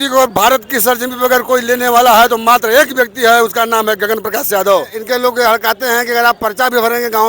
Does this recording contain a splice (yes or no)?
yes